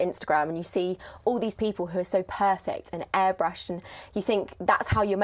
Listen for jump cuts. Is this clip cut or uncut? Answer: uncut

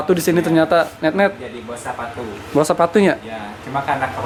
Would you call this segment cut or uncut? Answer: uncut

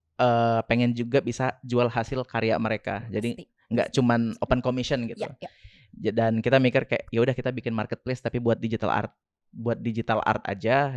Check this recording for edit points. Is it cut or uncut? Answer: uncut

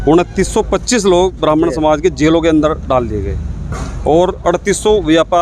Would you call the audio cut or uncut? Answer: uncut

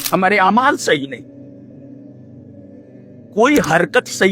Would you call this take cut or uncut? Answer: cut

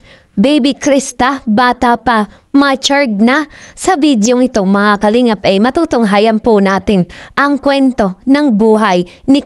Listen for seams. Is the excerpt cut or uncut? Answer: uncut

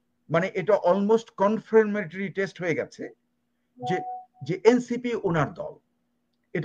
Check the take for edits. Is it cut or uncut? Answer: uncut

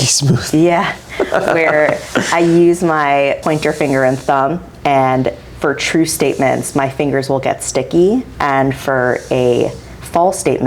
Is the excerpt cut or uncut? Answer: cut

